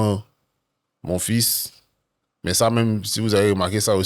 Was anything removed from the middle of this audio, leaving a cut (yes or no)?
no